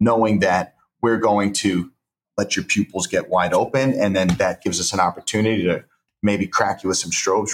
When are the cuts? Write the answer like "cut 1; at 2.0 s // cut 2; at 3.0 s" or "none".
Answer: cut 1; at 2.2 s